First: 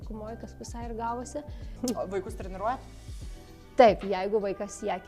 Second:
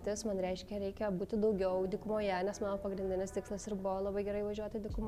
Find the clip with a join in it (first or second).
first